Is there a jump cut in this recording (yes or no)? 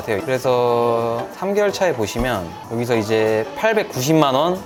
no